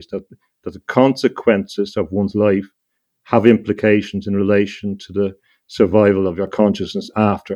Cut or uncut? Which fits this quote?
uncut